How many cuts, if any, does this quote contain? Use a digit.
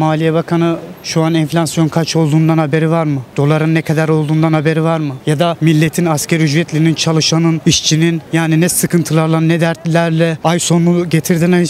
5